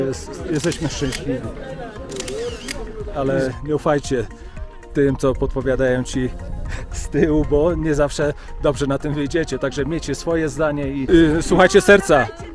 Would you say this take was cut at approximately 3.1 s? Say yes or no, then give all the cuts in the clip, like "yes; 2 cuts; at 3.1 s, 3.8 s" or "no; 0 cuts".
yes; 2 cuts; at 3.1 s, 11.0 s